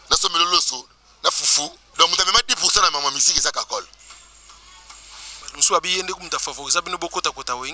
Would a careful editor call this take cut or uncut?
cut